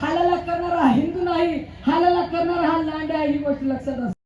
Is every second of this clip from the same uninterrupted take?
yes; 0 cuts

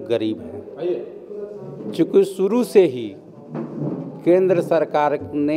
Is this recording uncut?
yes; 0 cuts

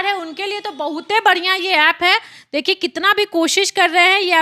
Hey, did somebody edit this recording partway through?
no; 0 cuts

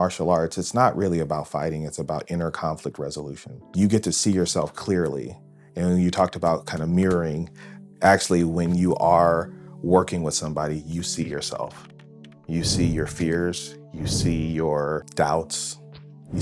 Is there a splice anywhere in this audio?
yes; 2 cuts; at 3.7 s, 15.1 s

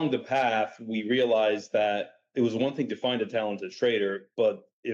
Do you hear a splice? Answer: no; 0 cuts

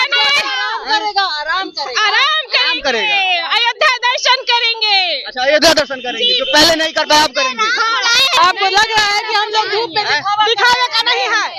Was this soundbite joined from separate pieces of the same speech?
yes; 1 cut; at 8.4 s

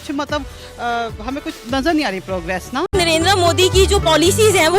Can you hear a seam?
yes; 1 cut; at 2.9 s

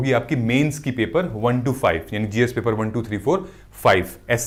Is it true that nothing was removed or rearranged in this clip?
yes; 0 cuts

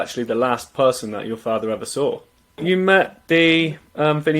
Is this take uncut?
no; 1 cut; at 2.6 s

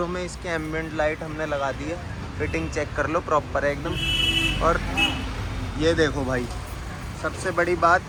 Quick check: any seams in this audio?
no; 0 cuts

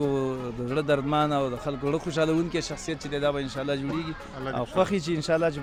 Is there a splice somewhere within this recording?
no; 0 cuts

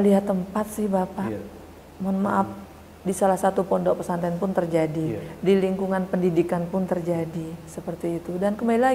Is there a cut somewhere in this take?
no; 0 cuts

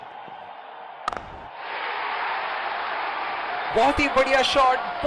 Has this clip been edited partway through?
no; 0 cuts

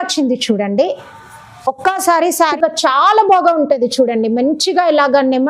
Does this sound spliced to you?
yes; 1 cut; at 2.5 s

